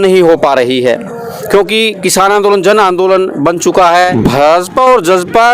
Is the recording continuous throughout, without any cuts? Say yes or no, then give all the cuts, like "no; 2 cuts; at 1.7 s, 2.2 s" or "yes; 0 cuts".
no; 1 cut; at 4.1 s